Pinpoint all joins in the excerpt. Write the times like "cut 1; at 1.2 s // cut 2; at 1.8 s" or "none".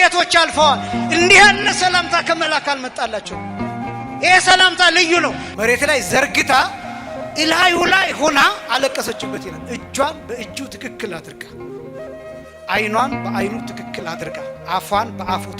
cut 1; at 5.4 s